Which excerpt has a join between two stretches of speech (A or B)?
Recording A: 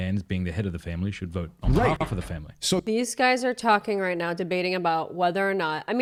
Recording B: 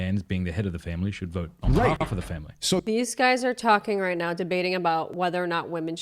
B